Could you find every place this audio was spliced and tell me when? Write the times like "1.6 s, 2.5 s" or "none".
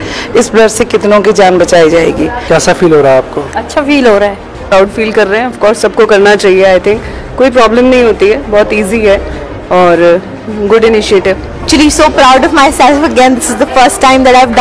2.3 s, 4.6 s, 11.7 s